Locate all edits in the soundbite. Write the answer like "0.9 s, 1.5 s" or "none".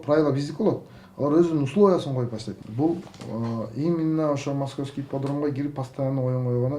2.5 s